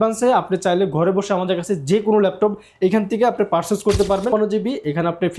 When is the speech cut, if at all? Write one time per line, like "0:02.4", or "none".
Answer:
0:04.3